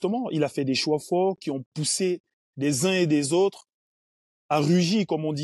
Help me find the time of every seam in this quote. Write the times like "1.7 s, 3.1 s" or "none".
none